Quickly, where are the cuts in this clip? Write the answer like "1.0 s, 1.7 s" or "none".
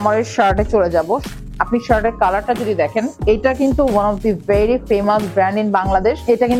none

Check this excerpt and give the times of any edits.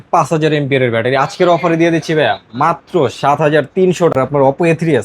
4.1 s

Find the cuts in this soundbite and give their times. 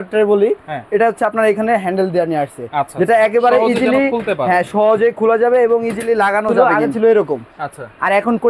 6.7 s

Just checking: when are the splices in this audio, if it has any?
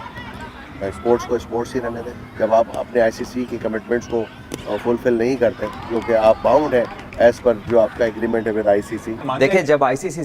2.1 s, 9.2 s

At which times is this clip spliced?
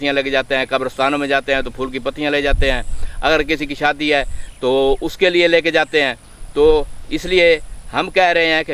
none

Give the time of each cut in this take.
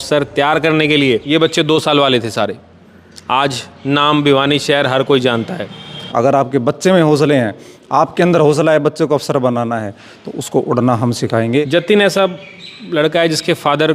1.2 s, 6.1 s, 11.7 s

